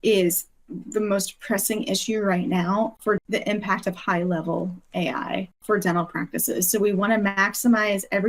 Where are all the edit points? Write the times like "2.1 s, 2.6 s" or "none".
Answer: 3.0 s, 5.6 s